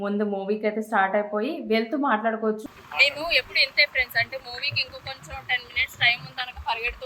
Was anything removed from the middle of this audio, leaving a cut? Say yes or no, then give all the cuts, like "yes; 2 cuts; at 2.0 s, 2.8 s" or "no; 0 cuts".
yes; 1 cut; at 2.6 s